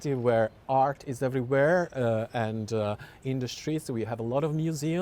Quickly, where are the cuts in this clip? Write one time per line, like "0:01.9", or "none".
none